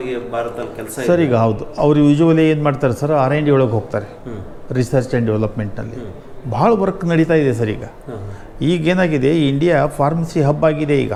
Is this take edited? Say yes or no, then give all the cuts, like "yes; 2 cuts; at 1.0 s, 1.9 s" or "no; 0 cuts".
no; 0 cuts